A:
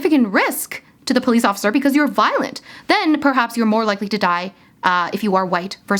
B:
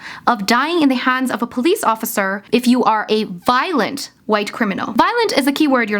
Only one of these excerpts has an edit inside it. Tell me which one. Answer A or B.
B